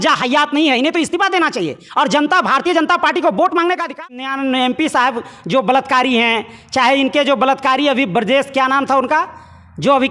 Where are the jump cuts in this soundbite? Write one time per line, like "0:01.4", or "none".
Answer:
0:04.0